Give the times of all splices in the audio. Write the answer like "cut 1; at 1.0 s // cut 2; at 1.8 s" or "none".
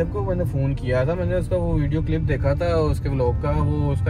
none

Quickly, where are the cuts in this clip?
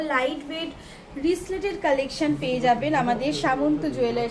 none

